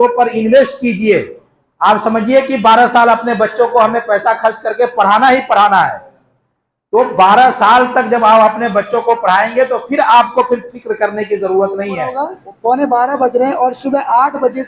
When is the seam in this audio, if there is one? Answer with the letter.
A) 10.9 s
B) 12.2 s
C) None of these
B